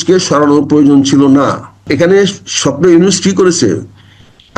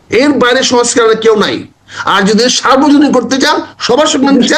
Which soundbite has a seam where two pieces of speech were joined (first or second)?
first